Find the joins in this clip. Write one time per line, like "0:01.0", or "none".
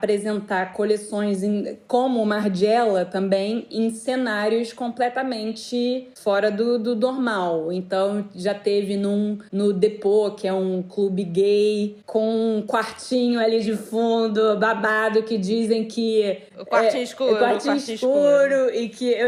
none